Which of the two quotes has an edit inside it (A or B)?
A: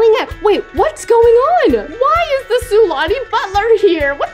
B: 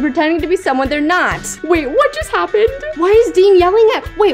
B